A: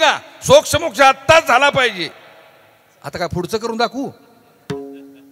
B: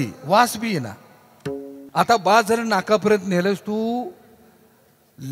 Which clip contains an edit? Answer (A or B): B